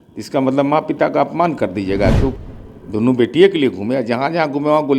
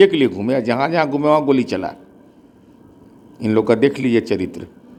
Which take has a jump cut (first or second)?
first